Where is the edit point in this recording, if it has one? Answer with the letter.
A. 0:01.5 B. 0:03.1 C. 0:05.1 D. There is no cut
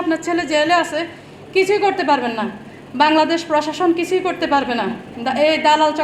C